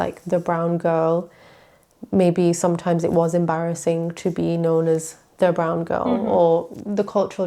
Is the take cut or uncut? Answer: uncut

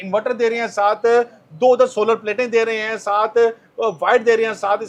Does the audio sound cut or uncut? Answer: uncut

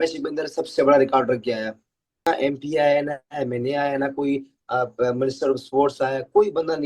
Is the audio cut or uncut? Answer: cut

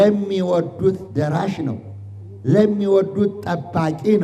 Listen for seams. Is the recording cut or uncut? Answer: uncut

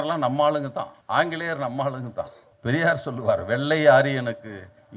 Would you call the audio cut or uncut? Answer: cut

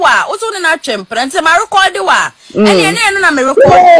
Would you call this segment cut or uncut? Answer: uncut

